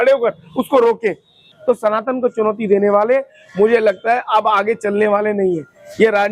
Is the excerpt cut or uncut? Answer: cut